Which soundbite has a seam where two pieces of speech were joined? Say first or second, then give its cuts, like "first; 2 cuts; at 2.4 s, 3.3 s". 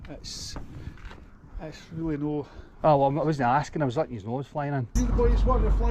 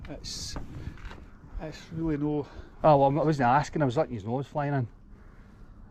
first; 1 cut; at 4.9 s